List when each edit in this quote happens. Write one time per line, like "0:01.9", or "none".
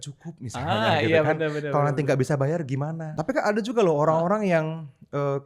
0:03.1